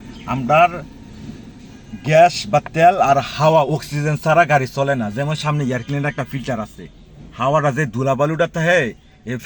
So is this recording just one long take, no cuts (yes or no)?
yes